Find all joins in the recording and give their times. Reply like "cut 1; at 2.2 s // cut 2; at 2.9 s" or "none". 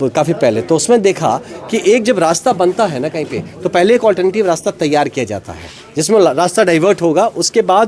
none